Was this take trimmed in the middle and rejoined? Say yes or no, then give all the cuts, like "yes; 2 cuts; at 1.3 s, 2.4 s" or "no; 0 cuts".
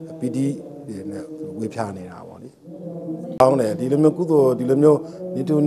no; 0 cuts